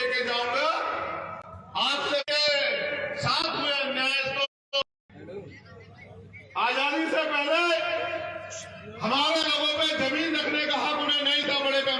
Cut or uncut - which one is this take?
cut